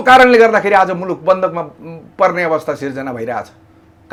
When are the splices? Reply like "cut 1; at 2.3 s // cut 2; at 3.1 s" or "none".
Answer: none